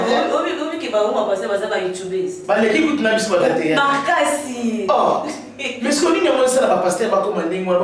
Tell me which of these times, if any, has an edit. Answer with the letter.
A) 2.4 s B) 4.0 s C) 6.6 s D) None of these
A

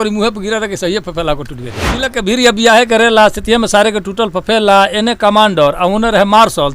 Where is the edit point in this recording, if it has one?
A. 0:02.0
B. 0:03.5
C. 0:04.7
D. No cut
A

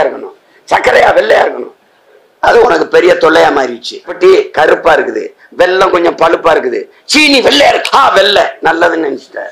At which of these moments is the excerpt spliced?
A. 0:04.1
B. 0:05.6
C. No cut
A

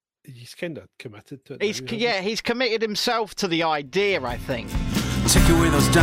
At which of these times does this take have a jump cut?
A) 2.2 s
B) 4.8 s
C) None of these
B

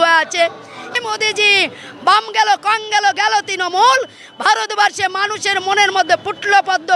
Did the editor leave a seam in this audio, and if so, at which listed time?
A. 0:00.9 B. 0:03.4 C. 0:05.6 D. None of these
A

